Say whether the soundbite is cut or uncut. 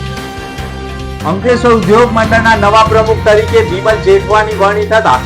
cut